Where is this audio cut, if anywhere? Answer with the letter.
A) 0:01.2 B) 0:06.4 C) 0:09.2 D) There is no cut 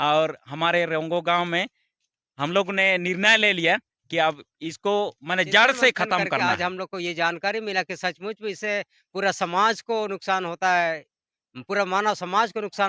B